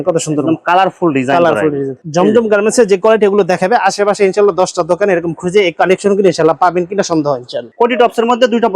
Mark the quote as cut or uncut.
cut